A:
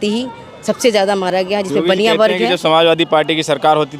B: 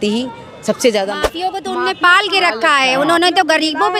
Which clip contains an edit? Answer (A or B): B